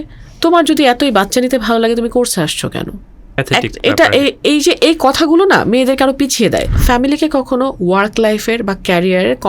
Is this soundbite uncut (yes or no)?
no